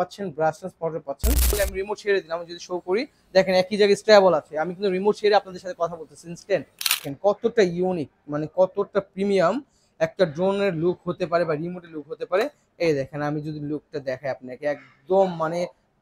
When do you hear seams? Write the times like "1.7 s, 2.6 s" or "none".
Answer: 1.5 s, 7.0 s